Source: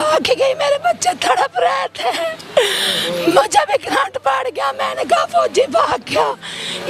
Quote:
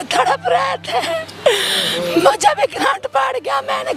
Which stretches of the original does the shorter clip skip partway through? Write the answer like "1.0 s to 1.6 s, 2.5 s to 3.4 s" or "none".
none